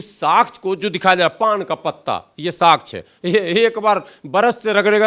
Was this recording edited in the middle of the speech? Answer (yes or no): no